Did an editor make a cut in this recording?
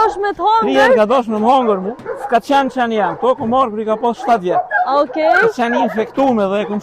yes; 1 cut; at 2.0 s

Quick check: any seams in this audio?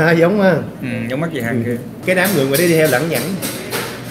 yes; 1 cut; at 1.9 s

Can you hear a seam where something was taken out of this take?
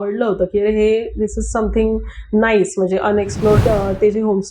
yes; 1 cut; at 3.6 s

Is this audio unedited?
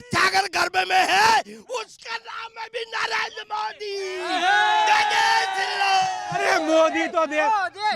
yes; 0 cuts

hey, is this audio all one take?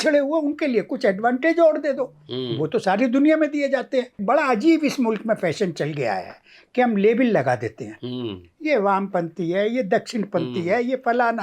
no; 1 cut; at 4.2 s

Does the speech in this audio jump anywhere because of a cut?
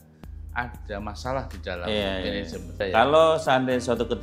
yes; 1 cut; at 2.8 s

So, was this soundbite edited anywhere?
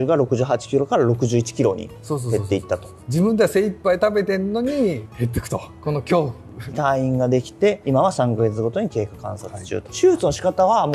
no; 0 cuts

